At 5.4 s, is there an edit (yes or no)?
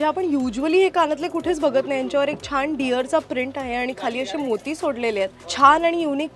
yes